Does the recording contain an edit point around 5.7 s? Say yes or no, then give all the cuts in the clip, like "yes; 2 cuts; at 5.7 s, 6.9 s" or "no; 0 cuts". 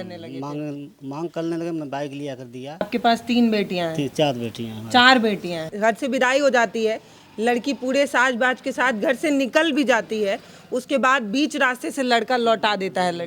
yes; 2 cuts; at 2.9 s, 5.7 s